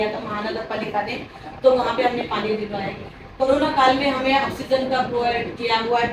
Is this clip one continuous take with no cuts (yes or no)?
yes